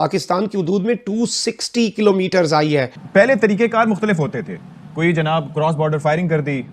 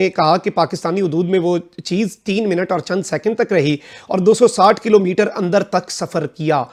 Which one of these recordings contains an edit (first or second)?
first